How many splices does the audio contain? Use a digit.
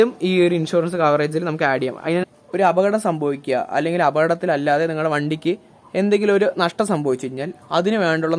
1